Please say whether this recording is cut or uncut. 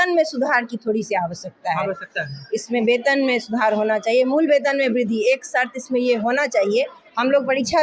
uncut